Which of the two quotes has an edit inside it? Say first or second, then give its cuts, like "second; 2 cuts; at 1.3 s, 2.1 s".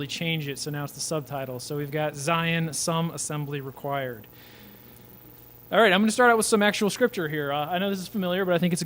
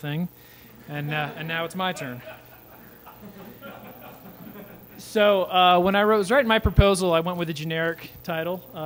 first; 1 cut; at 3.2 s